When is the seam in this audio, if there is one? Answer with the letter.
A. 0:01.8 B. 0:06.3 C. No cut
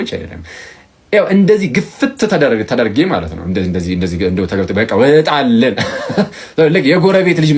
C